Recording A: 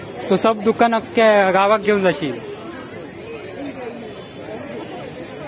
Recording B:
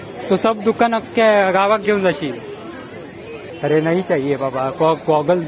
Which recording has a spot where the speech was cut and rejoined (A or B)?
B